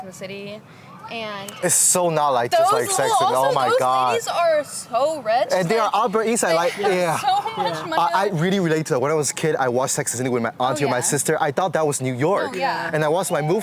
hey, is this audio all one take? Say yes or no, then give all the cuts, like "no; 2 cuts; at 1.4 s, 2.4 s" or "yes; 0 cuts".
yes; 0 cuts